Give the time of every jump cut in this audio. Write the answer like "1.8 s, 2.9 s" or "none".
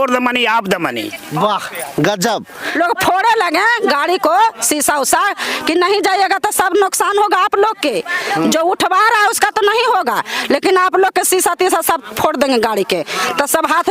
2.7 s